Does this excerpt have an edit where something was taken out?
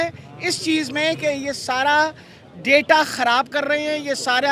no; 0 cuts

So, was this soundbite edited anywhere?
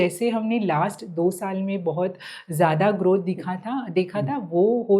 no; 0 cuts

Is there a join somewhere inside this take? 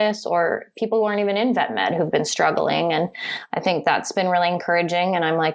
no; 0 cuts

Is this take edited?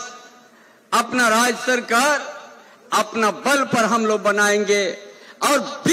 no; 0 cuts

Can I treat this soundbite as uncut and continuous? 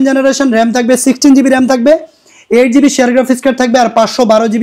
yes; 0 cuts

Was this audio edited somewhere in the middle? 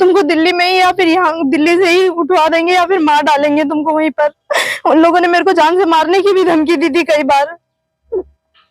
yes; 1 cut; at 4.4 s

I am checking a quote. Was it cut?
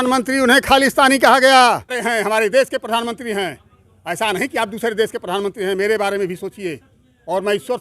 yes; 1 cut; at 2.0 s

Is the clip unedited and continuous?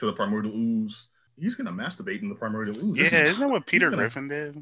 no; 1 cut; at 1.2 s

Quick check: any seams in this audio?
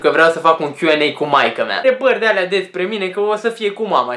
no; 0 cuts

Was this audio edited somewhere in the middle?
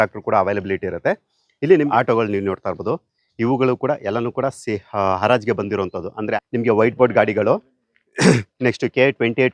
yes; 2 cuts; at 1.9 s, 6.3 s

